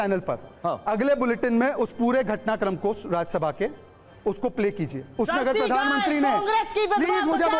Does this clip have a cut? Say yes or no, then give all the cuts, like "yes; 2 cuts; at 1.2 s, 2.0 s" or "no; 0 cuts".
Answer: no; 0 cuts